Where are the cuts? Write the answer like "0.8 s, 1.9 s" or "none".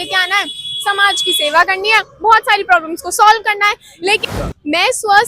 4.2 s